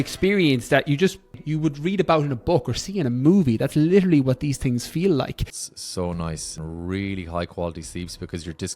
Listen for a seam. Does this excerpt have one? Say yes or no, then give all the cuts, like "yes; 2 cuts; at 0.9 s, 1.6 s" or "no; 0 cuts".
yes; 3 cuts; at 1.4 s, 5.5 s, 6.6 s